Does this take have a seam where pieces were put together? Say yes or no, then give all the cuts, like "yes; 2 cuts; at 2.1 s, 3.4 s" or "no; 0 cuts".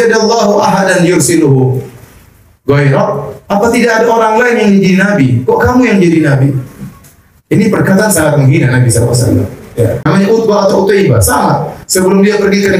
yes; 1 cut; at 10.0 s